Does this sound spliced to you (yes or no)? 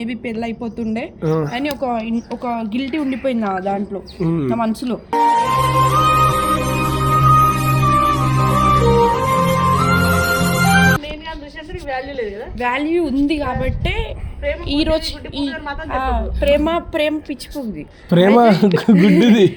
yes